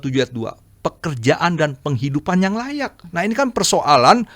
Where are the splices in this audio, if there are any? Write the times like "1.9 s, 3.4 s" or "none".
3.0 s